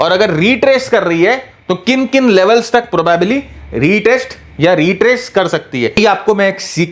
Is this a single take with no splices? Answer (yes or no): no